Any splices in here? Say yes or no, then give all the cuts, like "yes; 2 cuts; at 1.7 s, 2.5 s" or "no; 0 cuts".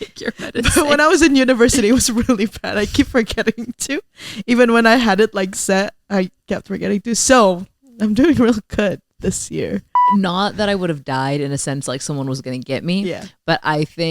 yes; 1 cut; at 9.9 s